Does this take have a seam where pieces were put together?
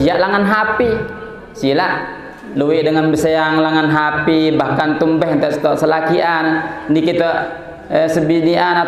no; 0 cuts

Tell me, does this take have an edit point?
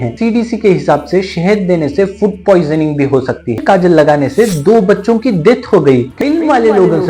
yes; 2 cuts; at 3.6 s, 6.1 s

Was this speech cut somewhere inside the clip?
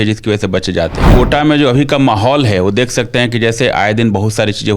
yes; 1 cut; at 1.1 s

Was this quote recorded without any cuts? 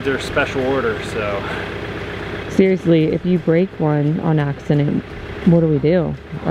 yes; 0 cuts

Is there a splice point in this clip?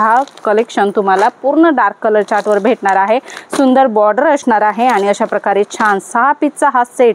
no; 0 cuts

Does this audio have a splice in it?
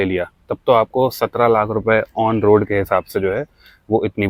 no; 0 cuts

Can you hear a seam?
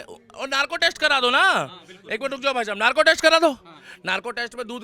no; 0 cuts

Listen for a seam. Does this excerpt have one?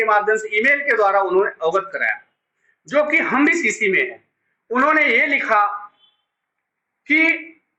no; 0 cuts

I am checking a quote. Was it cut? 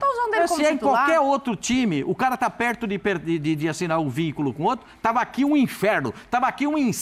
no; 0 cuts

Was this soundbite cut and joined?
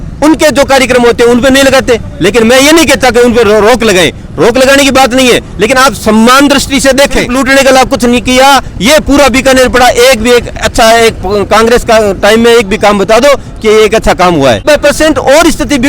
yes; 2 cuts; at 7.3 s, 14.6 s

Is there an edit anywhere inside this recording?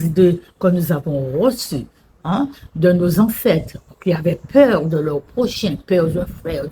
no; 0 cuts

